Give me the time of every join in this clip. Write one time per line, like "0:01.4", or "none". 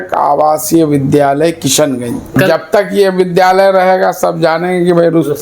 0:02.3